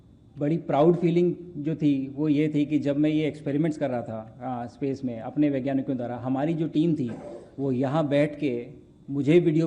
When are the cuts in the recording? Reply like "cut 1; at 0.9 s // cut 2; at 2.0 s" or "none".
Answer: none